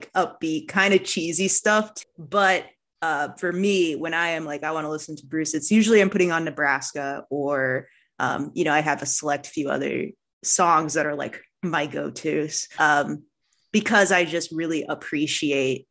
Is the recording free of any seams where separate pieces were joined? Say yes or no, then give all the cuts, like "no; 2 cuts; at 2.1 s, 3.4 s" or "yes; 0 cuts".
no; 2 cuts; at 1.9 s, 12.7 s